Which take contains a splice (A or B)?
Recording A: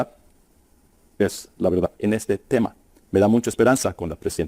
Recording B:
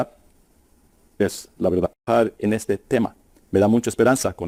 A